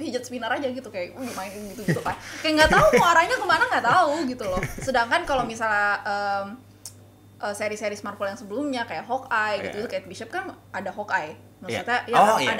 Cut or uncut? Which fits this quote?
uncut